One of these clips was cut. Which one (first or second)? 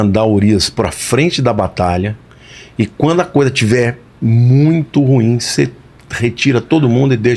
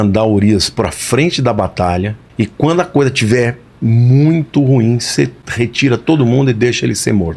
second